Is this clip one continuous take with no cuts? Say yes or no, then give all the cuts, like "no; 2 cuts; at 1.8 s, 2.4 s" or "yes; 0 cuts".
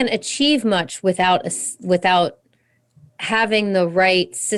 yes; 0 cuts